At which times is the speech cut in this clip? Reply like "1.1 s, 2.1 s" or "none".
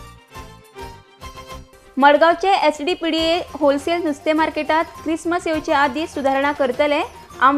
1.5 s